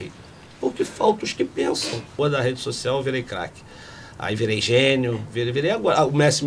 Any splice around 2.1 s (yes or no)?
yes